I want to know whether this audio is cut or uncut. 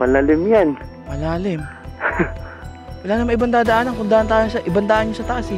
uncut